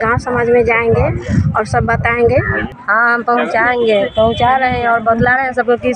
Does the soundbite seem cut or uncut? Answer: cut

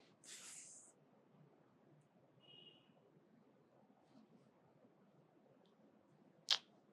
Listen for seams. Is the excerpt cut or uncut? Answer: uncut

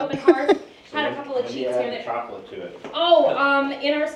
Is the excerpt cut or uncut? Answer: uncut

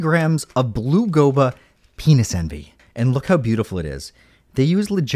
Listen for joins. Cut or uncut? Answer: cut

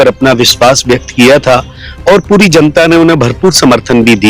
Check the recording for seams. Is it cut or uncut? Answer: uncut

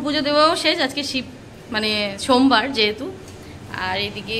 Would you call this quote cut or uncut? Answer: uncut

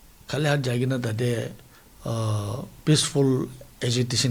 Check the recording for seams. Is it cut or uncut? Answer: uncut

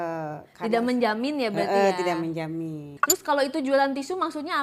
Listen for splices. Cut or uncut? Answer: cut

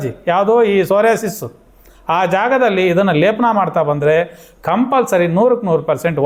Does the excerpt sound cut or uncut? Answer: uncut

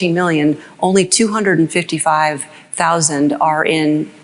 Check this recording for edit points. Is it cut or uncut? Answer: uncut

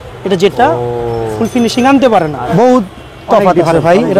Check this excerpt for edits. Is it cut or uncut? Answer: cut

